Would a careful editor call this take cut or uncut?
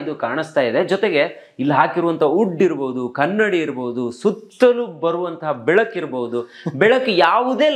uncut